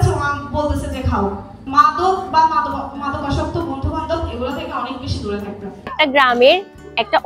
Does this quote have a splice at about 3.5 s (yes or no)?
no